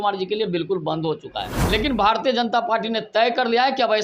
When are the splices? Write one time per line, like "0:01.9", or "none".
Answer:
0:01.5